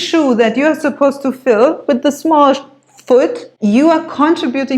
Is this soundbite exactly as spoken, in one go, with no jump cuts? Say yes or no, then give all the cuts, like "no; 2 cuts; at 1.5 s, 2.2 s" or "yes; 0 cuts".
no; 1 cut; at 3.5 s